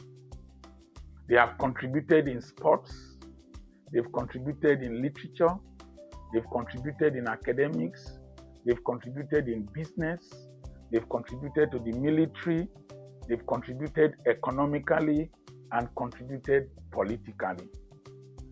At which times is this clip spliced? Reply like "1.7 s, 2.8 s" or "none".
1.3 s